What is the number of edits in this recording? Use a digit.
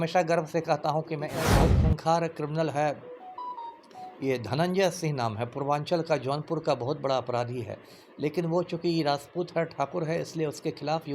1